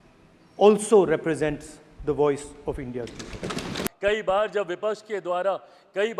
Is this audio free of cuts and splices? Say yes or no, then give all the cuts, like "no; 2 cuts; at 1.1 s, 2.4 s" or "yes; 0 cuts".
no; 1 cut; at 3.9 s